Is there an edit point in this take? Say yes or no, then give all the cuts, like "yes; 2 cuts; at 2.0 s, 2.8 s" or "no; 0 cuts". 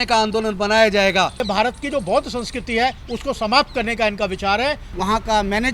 yes; 2 cuts; at 1.4 s, 4.9 s